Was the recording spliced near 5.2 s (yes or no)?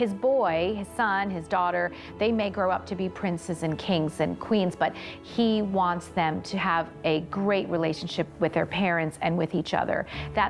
no